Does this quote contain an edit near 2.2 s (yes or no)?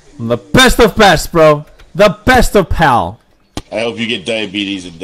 no